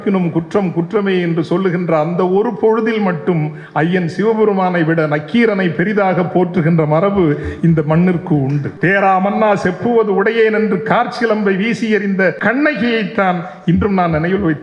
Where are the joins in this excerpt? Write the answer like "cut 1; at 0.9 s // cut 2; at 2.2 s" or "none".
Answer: cut 1; at 8.7 s // cut 2; at 12.4 s

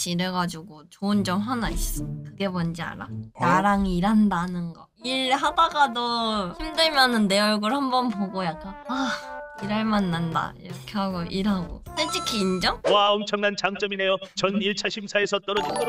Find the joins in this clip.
cut 1; at 12.8 s

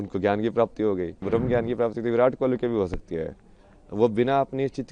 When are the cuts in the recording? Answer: cut 1; at 1.2 s

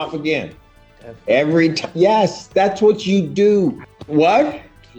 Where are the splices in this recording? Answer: cut 1; at 3.9 s

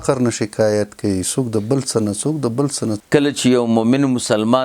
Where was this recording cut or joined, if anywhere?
cut 1; at 3.0 s

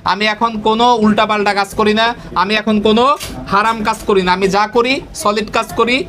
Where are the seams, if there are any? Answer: none

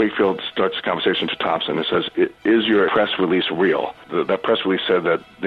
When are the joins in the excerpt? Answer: cut 1; at 2.9 s // cut 2; at 4.0 s

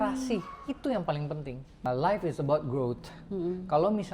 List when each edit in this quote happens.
cut 1; at 1.8 s

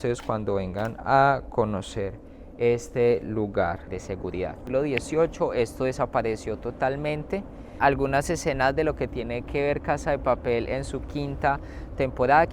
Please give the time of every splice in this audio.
cut 1; at 3.9 s // cut 2; at 7.7 s

